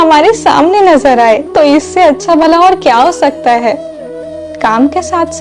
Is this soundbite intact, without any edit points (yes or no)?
no